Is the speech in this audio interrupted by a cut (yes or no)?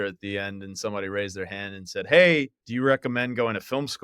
yes